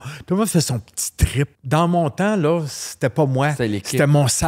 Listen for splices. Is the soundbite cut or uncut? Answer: cut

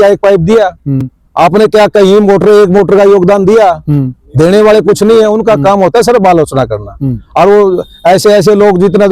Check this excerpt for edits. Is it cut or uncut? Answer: uncut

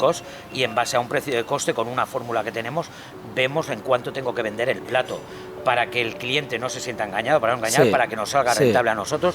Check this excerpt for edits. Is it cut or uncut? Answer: uncut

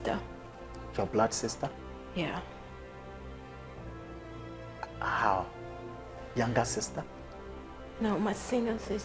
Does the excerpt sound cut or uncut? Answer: uncut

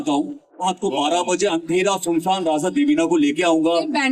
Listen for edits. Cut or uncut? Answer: uncut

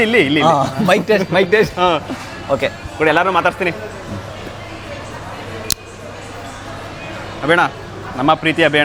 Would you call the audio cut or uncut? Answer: uncut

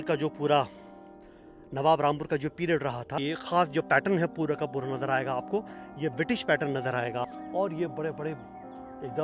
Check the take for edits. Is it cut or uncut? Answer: cut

